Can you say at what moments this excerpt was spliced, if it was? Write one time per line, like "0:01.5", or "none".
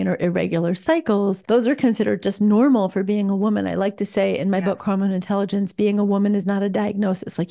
0:01.4